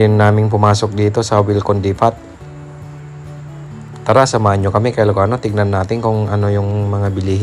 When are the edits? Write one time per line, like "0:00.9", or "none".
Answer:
none